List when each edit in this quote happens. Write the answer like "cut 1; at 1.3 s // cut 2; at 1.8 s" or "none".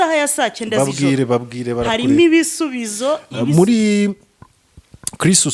cut 1; at 3.3 s